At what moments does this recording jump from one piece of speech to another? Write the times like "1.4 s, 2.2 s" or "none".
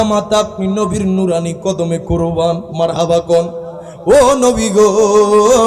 none